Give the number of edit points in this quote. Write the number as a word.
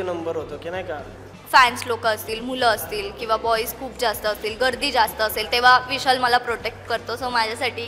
one